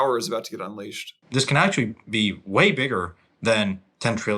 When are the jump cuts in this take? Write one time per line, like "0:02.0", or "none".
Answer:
0:01.2